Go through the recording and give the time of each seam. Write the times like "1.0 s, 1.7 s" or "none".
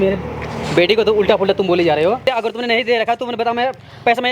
2.2 s